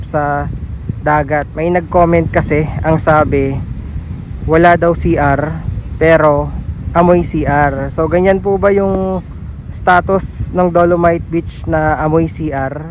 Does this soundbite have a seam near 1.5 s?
yes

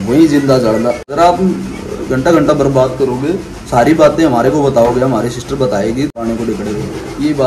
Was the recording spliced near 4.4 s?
no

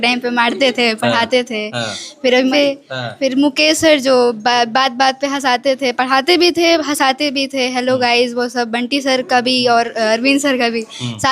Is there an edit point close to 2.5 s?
yes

